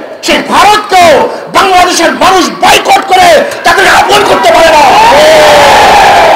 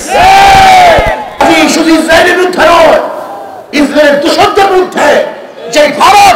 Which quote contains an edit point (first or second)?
second